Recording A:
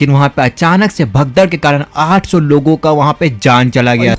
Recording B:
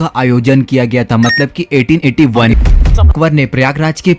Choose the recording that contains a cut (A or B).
B